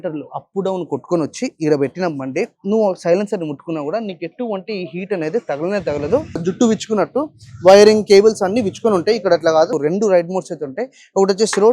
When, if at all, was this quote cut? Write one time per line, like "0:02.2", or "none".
0:06.4
0:09.8